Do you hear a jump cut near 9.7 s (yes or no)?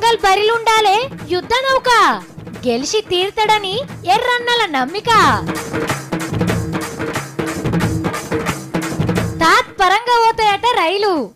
no